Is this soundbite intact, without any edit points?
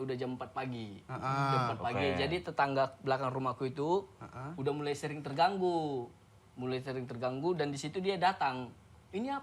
yes; 0 cuts

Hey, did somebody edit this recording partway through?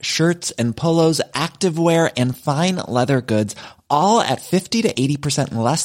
no; 0 cuts

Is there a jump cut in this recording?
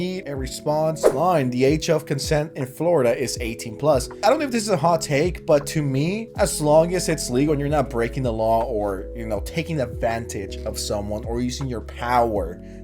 yes; 2 cuts; at 1.1 s, 3.7 s

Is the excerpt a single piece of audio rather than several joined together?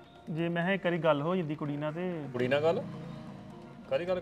no; 1 cut; at 2.3 s

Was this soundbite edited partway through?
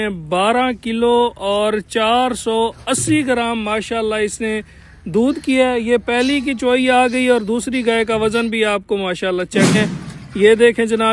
yes; 1 cut; at 9.8 s

